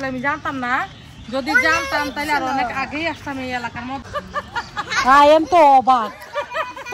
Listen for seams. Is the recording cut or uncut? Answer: cut